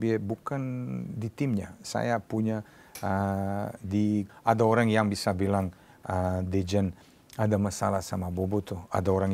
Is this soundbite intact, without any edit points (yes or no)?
no